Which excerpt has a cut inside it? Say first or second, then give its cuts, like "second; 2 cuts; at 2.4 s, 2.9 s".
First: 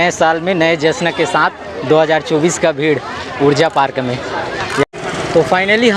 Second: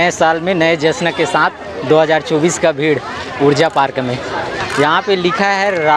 first; 1 cut; at 4.8 s